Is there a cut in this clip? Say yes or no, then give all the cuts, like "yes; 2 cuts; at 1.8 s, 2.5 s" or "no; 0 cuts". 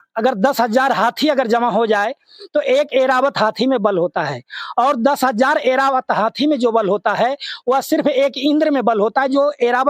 no; 0 cuts